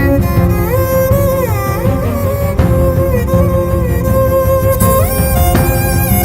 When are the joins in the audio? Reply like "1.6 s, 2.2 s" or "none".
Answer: none